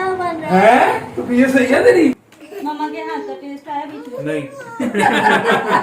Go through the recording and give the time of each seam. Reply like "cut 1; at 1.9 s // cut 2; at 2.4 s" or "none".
cut 1; at 2.3 s